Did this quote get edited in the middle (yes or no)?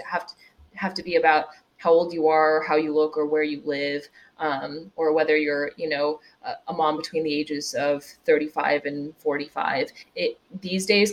no